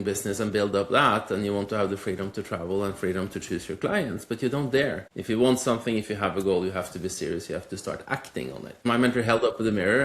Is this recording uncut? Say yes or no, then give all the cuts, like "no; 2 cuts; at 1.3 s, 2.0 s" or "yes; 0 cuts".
no; 2 cuts; at 5.1 s, 8.8 s